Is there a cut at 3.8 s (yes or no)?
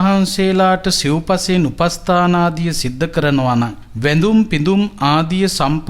yes